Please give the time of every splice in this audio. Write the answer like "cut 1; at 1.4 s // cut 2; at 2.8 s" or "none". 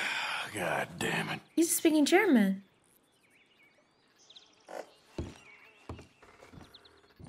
none